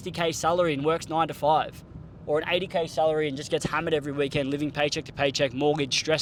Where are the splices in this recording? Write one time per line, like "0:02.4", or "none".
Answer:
none